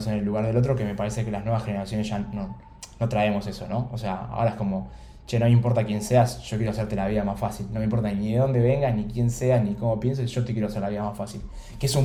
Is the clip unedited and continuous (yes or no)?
yes